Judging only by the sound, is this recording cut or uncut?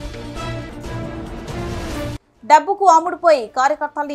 uncut